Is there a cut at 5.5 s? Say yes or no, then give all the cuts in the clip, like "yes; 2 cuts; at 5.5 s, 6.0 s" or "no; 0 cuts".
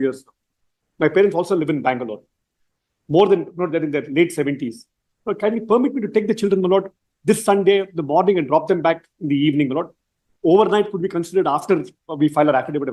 no; 0 cuts